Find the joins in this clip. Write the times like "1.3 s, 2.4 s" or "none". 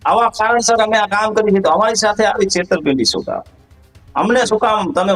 none